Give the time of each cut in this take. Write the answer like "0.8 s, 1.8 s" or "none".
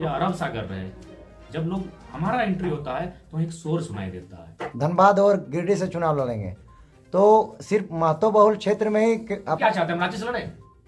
4.6 s, 9.6 s

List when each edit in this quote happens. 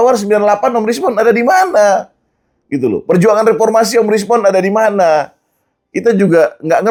none

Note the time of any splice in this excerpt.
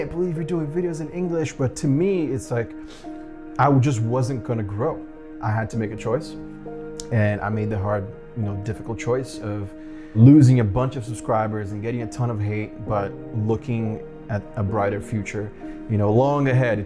10.2 s

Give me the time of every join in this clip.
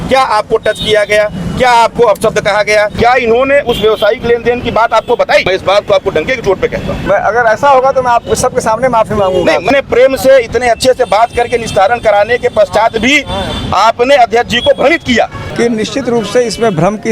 2.9 s, 5.5 s, 7.0 s, 9.7 s, 15.4 s

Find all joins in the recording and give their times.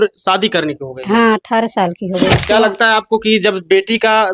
2.4 s

